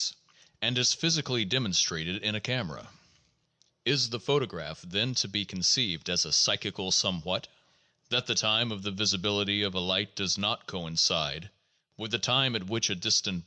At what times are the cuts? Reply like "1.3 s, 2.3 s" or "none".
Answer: 1.2 s